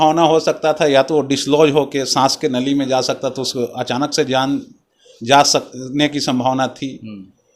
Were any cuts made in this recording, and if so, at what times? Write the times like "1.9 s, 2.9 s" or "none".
none